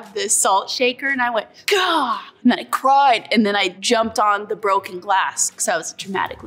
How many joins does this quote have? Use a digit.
2